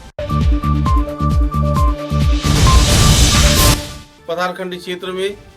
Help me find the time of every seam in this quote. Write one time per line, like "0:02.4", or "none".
0:03.7